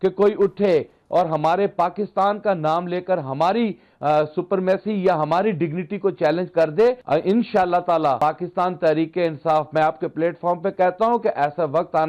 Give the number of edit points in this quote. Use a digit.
2